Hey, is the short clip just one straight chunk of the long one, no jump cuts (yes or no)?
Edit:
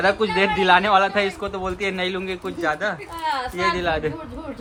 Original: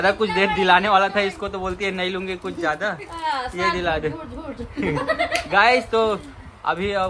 yes